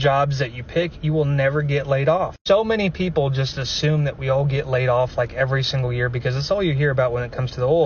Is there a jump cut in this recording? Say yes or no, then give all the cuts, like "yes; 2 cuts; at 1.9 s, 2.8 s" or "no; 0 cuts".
no; 0 cuts